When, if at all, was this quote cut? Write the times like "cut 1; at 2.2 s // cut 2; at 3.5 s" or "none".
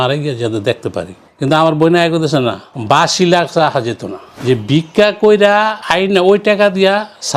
cut 1; at 1.2 s // cut 2; at 4.3 s

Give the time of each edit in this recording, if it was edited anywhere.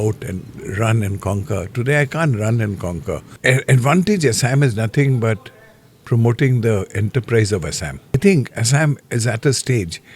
cut 1; at 3.3 s // cut 2; at 8.2 s

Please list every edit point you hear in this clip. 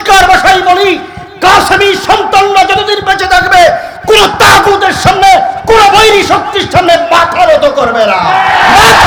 none

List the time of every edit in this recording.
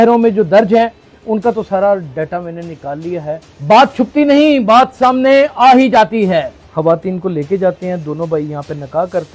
cut 1; at 3.5 s // cut 2; at 6.6 s

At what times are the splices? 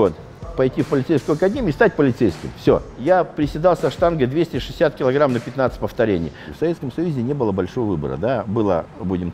cut 1; at 2.9 s // cut 2; at 6.5 s

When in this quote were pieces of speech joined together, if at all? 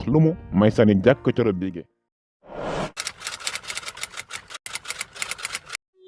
cut 1; at 1.6 s

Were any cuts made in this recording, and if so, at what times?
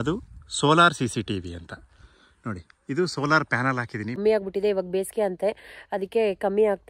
cut 1; at 4.2 s

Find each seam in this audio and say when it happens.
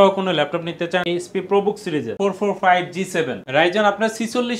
cut 1; at 1.1 s // cut 2; at 2.1 s

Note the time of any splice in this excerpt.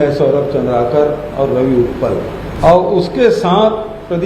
cut 1; at 2.5 s

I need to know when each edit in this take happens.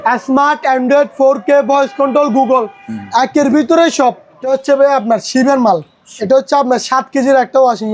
cut 1; at 4.5 s

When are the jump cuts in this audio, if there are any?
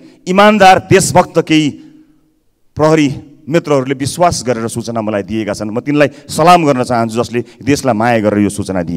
none

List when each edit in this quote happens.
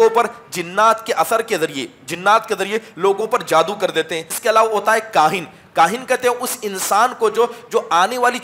cut 1; at 4.3 s

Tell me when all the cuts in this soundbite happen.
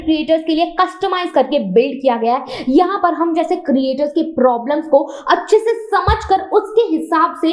none

